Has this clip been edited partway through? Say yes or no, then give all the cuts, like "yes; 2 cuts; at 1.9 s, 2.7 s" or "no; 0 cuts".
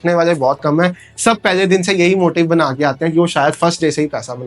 no; 0 cuts